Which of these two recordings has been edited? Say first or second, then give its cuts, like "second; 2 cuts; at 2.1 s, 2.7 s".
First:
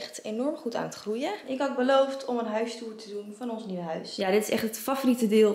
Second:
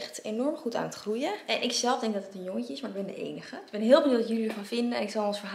first; 2 cuts; at 1.4 s, 4.1 s